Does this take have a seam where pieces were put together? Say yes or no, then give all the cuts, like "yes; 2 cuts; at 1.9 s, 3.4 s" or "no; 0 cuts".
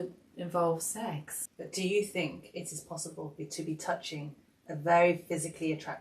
yes; 1 cut; at 1.6 s